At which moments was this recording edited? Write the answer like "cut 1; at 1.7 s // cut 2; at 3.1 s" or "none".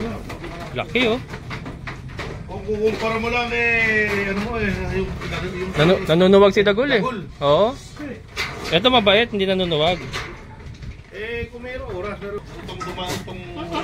cut 1; at 12.4 s